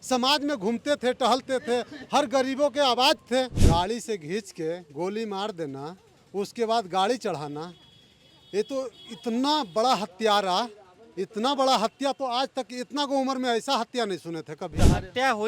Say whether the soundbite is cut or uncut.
cut